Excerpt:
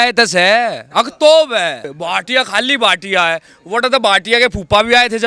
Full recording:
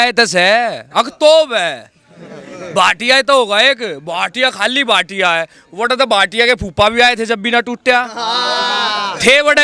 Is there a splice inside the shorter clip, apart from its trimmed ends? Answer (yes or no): yes